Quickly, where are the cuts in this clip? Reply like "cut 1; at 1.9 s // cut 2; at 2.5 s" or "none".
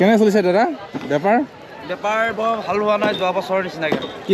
none

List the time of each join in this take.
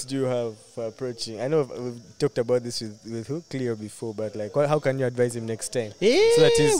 none

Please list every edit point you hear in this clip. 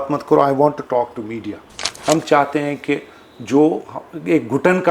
cut 1; at 1.9 s

